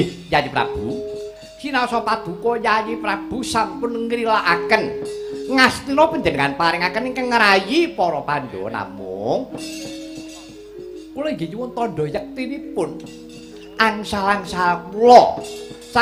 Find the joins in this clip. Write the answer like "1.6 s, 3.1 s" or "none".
none